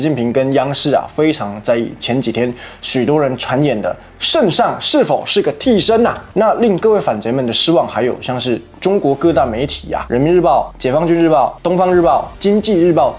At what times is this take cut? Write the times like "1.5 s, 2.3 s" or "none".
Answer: 6.2 s